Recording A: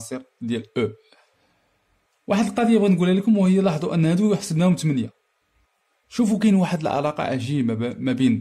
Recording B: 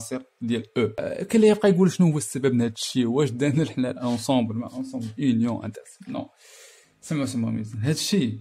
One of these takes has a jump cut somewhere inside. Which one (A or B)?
B